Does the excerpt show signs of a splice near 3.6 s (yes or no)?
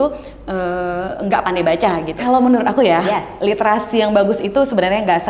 no